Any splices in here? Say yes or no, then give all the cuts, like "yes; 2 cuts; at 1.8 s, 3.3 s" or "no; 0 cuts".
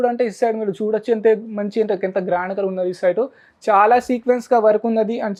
no; 0 cuts